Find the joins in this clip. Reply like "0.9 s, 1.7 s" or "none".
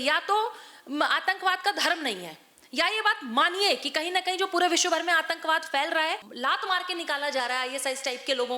6.3 s